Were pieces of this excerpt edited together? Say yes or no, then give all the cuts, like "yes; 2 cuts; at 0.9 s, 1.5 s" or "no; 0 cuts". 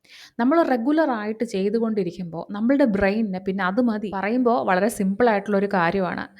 yes; 1 cut; at 4.2 s